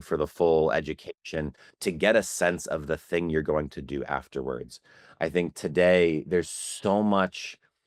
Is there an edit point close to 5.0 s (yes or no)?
no